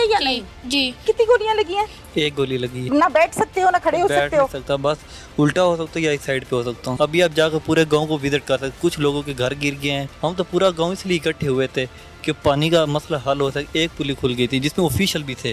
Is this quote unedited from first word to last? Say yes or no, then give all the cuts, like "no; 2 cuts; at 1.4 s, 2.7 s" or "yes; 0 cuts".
no; 4 cuts; at 1.0 s, 2.9 s, 6.9 s, 10.1 s